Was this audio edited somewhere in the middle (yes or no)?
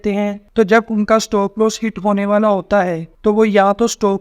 no